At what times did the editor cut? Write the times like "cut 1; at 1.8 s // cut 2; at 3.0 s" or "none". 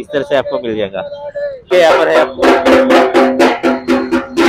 cut 1; at 1.6 s

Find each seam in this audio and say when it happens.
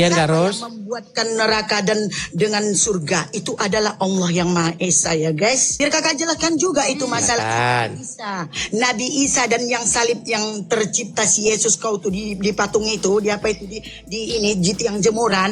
cut 1; at 5.7 s

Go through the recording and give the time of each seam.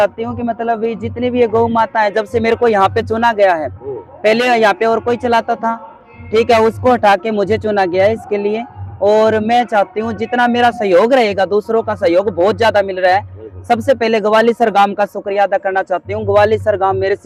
none

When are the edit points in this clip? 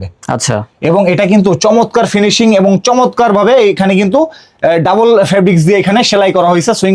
none

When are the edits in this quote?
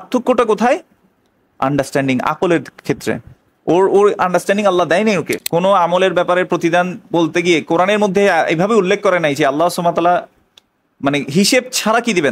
cut 1; at 5.4 s

